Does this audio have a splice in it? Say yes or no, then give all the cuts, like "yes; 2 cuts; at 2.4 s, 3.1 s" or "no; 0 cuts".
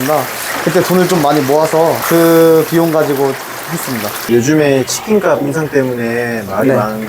yes; 1 cut; at 4.1 s